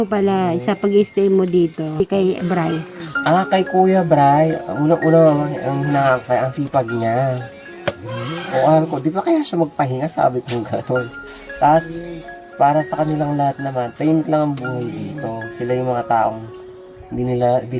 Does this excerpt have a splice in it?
yes; 1 cut; at 2.0 s

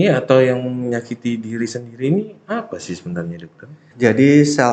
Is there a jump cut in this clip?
yes; 1 cut; at 3.8 s

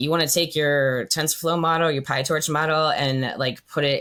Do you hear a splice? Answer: no; 0 cuts

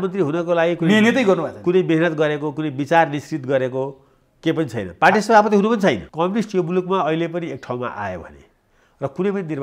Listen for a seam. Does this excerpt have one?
yes; 1 cut; at 6.1 s

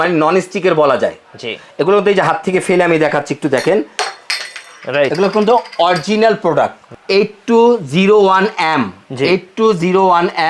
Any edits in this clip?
yes; 1 cut; at 6.9 s

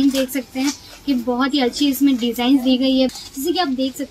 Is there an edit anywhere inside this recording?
yes; 1 cut; at 3.1 s

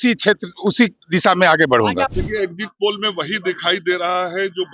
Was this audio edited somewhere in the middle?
yes; 1 cut; at 2.1 s

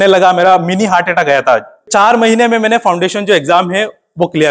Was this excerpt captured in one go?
no; 1 cut; at 1.8 s

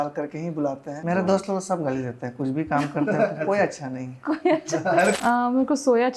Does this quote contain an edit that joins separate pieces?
yes; 2 cuts; at 0.9 s, 5.0 s

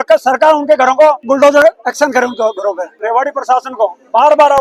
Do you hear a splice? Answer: yes; 2 cuts; at 1.2 s, 2.9 s

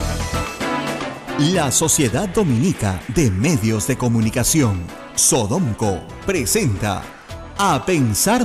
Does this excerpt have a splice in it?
yes; 1 cut; at 1.2 s

